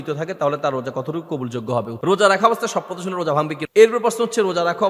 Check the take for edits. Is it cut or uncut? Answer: cut